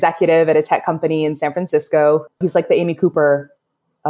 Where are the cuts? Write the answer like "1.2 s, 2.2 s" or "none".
none